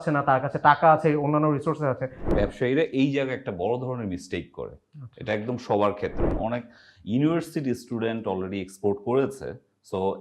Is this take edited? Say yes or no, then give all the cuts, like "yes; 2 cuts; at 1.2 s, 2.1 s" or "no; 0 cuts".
yes; 2 cuts; at 2.3 s, 6.3 s